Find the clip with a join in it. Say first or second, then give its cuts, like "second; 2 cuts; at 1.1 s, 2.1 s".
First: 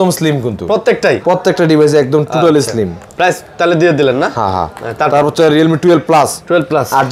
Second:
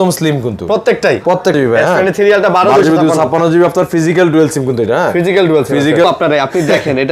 second; 2 cuts; at 1.5 s, 6.0 s